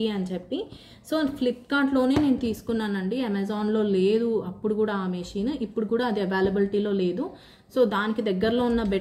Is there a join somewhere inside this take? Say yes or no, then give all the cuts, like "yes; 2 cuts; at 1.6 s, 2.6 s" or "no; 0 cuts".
no; 0 cuts